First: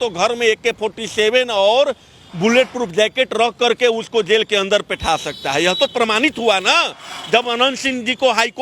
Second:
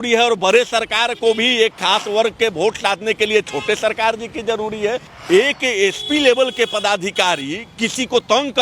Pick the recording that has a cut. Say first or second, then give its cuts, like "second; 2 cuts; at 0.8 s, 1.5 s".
second; 1 cut; at 5.1 s